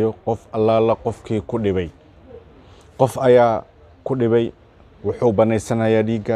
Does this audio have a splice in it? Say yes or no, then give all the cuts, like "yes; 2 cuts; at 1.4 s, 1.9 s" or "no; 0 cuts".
no; 0 cuts